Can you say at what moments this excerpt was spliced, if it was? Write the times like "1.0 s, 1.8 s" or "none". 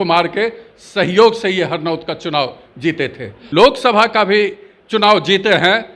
3.3 s